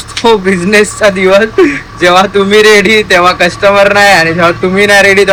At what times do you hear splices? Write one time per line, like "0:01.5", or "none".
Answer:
none